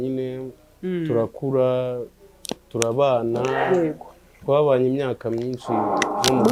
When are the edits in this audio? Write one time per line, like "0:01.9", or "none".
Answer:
none